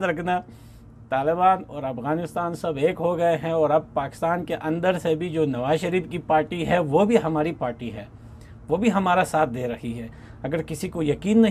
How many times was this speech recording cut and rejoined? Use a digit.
0